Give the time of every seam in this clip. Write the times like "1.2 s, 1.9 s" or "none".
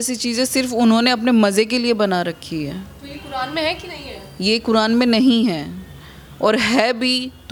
none